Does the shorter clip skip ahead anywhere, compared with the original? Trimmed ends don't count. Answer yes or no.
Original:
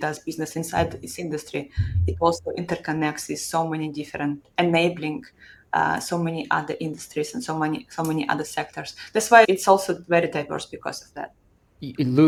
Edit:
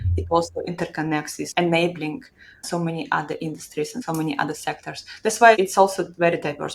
yes